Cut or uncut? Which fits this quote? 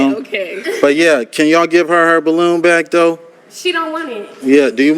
cut